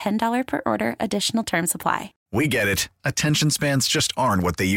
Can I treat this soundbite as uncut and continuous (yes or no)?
no